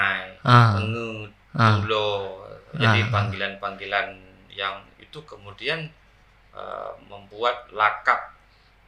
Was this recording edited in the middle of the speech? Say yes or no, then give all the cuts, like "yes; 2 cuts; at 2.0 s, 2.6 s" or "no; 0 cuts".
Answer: no; 0 cuts